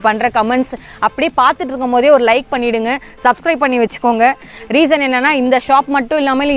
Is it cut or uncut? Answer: uncut